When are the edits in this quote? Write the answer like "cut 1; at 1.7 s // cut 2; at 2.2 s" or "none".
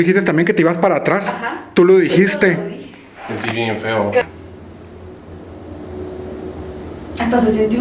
cut 1; at 4.2 s